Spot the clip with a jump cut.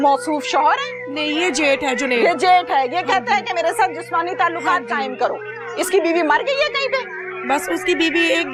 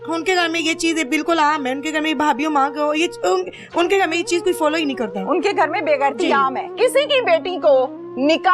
second; 1 cut; at 6.7 s

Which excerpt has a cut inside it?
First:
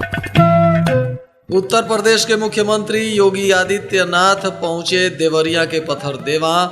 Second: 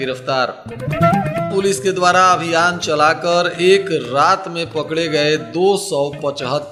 first; 1 cut; at 1.2 s

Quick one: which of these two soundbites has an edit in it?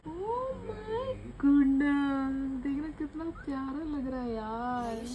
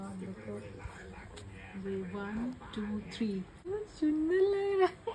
second; 1 cut; at 3.6 s

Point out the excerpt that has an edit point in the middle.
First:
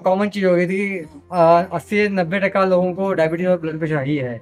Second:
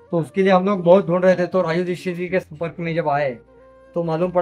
second; 1 cut; at 2.5 s

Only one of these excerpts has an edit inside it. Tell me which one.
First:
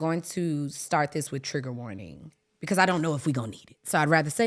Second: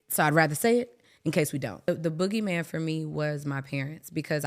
second; 1 cut; at 1.9 s

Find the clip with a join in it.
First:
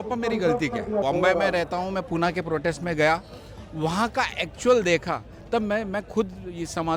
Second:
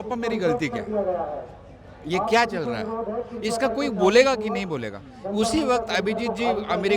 first; 1 cut; at 1.0 s

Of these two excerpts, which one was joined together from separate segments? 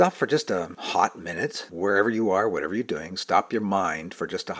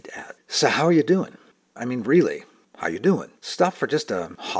second; 1 cut; at 1.7 s

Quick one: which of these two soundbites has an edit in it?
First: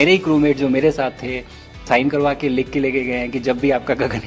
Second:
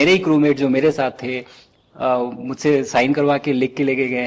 first; 1 cut; at 1.8 s

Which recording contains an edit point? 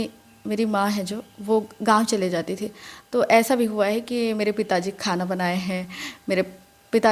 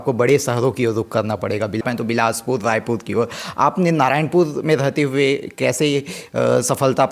second; 1 cut; at 1.8 s

